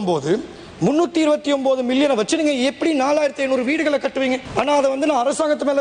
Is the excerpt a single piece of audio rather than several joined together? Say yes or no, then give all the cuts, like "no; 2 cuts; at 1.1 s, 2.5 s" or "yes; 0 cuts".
yes; 0 cuts